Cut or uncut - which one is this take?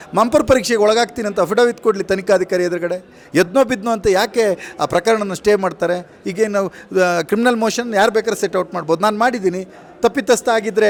uncut